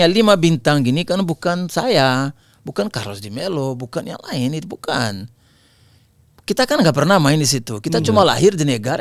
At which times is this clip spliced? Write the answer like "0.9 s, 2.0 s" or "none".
none